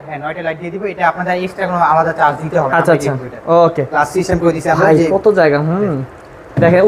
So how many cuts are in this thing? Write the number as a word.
zero